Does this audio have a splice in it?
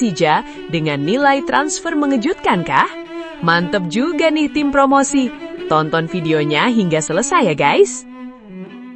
yes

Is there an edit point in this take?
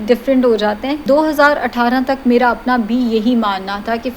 yes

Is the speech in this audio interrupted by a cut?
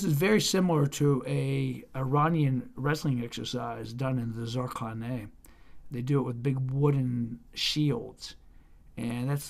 no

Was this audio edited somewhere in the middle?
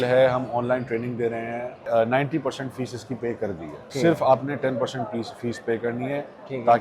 yes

